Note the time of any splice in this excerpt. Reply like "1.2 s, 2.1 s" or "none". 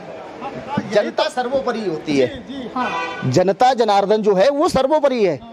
none